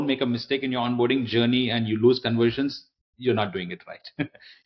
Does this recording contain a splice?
no; 0 cuts

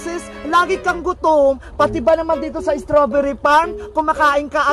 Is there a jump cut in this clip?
no; 0 cuts

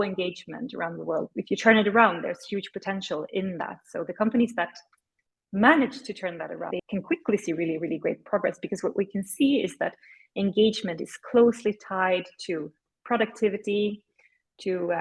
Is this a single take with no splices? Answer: no; 2 cuts; at 1.3 s, 6.8 s

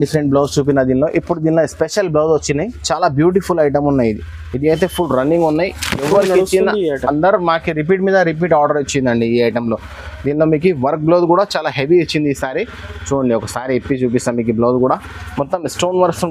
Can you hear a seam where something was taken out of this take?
no; 0 cuts

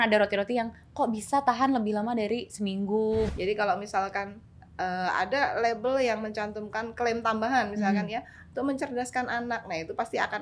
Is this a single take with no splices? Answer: no; 1 cut; at 3.3 s

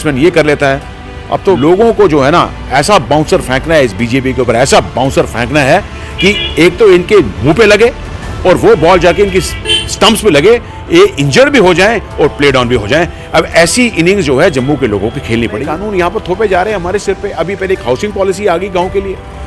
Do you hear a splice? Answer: yes; 2 cuts; at 1.6 s, 15.6 s

